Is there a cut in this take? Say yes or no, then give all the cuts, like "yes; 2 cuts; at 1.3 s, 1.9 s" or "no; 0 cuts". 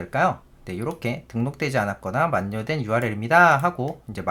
no; 0 cuts